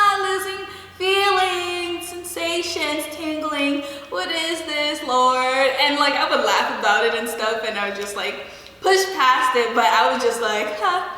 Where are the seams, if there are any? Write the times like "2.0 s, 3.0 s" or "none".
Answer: none